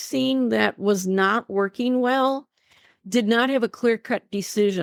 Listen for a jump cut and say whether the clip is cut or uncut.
uncut